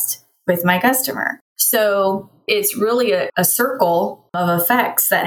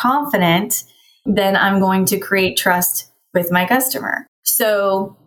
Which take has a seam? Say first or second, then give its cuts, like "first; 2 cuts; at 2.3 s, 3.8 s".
first; 1 cut; at 4.4 s